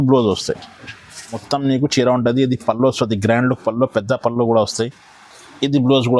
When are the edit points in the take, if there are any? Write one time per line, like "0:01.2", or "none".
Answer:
0:01.4